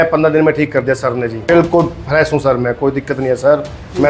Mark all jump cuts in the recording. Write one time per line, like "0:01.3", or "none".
0:01.5